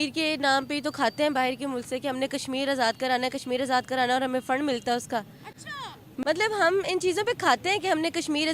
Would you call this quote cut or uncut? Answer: uncut